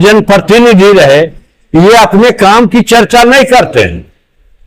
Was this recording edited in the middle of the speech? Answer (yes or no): no